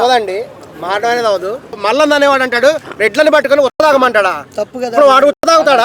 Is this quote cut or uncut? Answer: cut